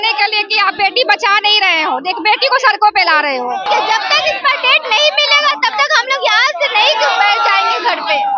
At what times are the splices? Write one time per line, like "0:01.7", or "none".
0:03.6